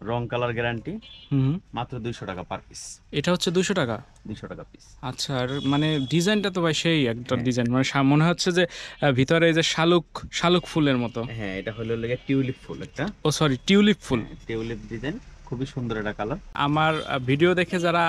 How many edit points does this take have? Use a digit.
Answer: 1